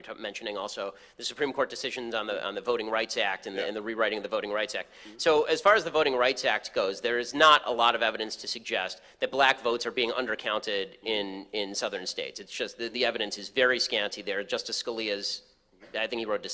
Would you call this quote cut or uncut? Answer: cut